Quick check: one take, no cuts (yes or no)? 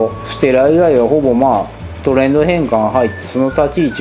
yes